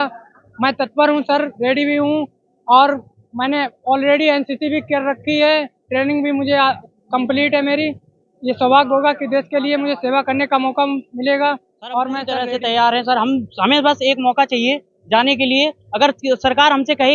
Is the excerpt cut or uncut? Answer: cut